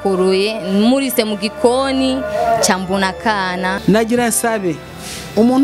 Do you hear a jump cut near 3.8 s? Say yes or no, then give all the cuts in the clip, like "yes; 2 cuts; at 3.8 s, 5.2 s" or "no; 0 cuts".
yes; 1 cut; at 3.8 s